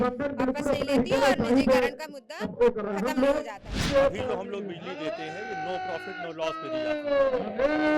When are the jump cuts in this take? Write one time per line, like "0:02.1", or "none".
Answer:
0:03.9